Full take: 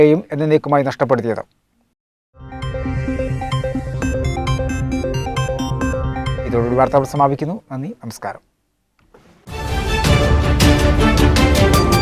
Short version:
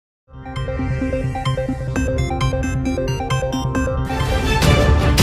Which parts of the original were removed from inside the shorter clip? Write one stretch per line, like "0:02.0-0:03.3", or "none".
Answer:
0:06.3-0:09.7